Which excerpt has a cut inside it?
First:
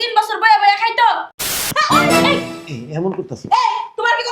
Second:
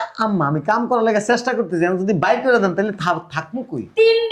first; 1 cut; at 1.6 s

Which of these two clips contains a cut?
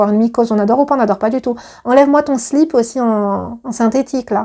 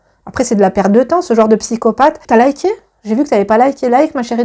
second; 1 cut; at 2.2 s

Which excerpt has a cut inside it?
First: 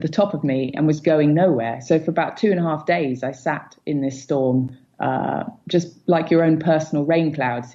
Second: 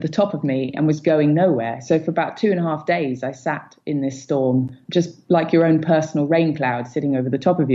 second; 1 cut; at 4.8 s

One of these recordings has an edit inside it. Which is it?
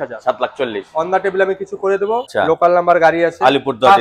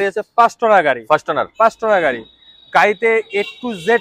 first; 1 cut; at 2.3 s

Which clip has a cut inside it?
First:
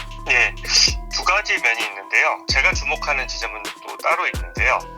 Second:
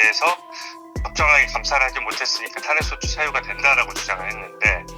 first; 1 cut; at 2.5 s

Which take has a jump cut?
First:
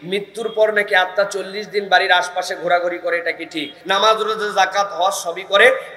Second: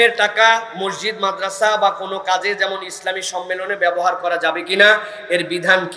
first; 1 cut; at 3.7 s

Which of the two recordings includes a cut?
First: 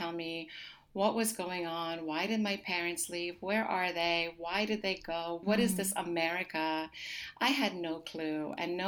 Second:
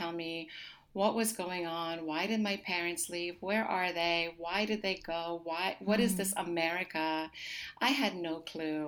first; 1 cut; at 5.4 s

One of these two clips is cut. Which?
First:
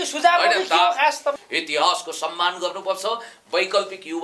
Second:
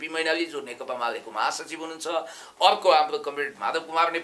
first; 1 cut; at 1.5 s

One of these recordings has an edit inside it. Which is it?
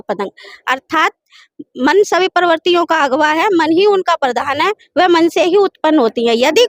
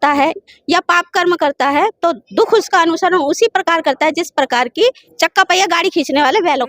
second; 1 cut; at 5.1 s

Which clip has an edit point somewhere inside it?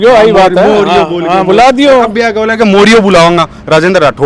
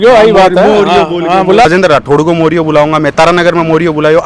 second; 1 cut; at 1.6 s

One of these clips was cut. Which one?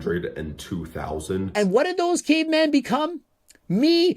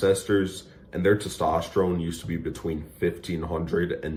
first; 1 cut; at 1.5 s

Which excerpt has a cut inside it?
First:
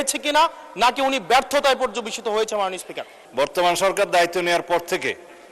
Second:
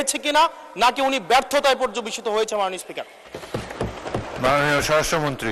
first; 1 cut; at 3.1 s

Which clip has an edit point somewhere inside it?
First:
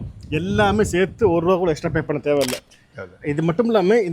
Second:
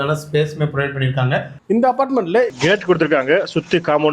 second; 2 cuts; at 1.6 s, 2.5 s

